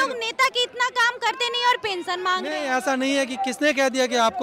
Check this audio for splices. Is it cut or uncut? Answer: uncut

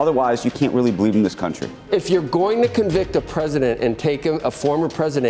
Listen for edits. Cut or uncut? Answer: cut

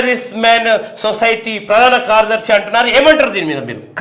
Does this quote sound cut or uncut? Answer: uncut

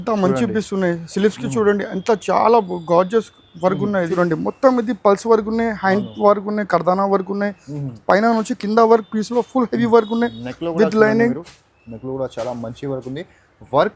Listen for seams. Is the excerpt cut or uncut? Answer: cut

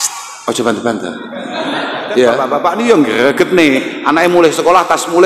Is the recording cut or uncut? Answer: cut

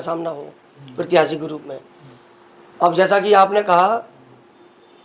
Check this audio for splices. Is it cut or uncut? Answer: uncut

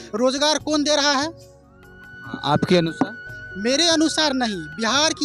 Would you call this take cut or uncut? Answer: uncut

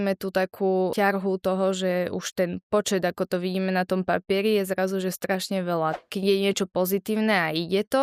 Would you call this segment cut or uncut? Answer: cut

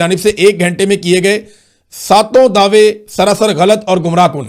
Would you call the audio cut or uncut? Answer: uncut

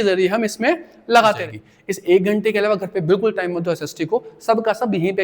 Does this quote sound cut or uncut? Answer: cut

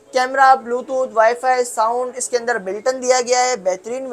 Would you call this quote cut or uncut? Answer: uncut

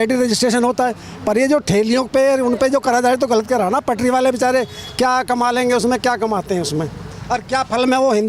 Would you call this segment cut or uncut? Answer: uncut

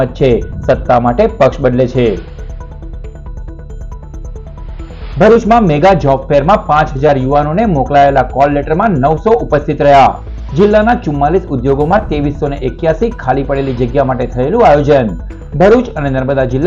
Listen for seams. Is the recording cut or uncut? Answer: uncut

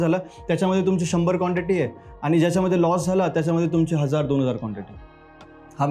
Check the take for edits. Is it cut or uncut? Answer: uncut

